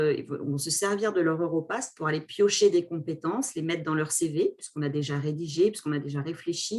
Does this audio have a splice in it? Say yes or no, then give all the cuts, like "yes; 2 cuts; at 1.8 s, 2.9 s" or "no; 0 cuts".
no; 0 cuts